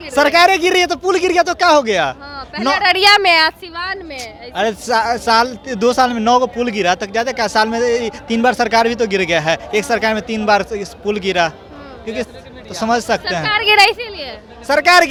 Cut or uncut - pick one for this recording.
uncut